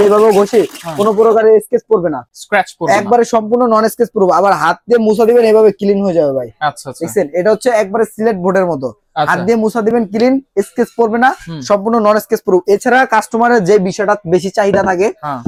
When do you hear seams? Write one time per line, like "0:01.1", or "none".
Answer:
none